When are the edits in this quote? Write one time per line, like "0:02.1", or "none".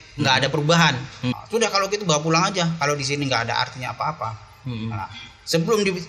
0:01.3